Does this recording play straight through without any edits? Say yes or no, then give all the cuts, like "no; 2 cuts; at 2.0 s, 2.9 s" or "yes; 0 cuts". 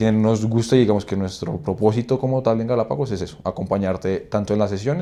yes; 0 cuts